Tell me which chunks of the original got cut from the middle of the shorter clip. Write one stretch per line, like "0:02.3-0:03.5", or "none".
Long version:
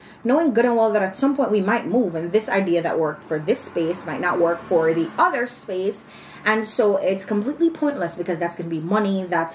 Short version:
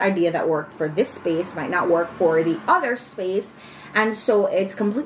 none